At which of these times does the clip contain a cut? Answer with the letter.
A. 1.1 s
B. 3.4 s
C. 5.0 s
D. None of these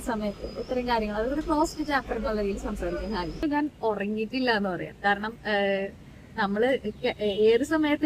B